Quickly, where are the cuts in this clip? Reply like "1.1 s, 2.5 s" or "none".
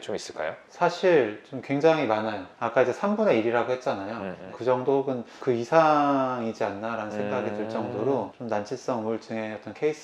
5.3 s, 8.3 s